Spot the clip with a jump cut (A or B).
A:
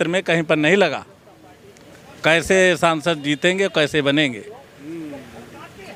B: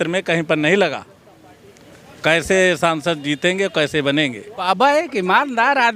B